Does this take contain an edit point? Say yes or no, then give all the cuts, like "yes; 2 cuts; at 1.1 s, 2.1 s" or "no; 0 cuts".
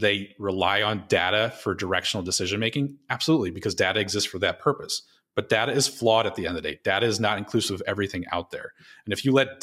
no; 0 cuts